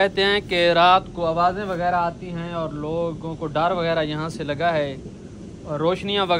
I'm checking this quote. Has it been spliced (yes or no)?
no